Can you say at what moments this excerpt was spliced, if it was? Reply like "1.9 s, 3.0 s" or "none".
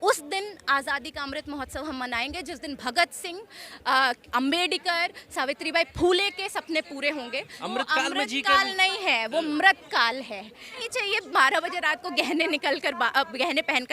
7.5 s, 10.8 s